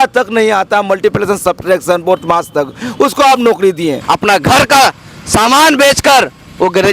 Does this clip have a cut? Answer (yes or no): yes